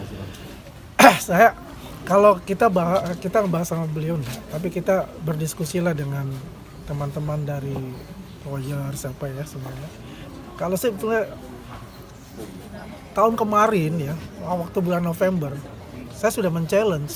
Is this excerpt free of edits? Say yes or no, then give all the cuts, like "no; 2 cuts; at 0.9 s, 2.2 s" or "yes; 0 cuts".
yes; 0 cuts